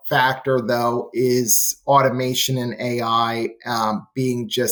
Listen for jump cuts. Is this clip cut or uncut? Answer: uncut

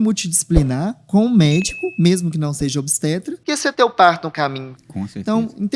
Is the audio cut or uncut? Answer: cut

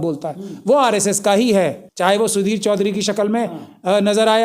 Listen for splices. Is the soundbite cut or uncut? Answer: cut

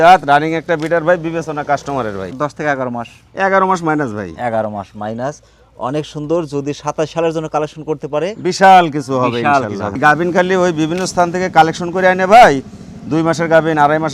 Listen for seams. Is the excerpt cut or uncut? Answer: cut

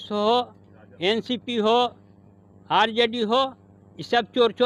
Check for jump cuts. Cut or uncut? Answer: uncut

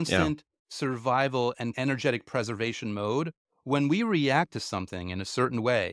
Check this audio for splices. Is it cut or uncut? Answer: cut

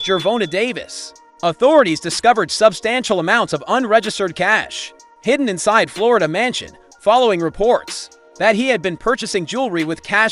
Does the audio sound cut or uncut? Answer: cut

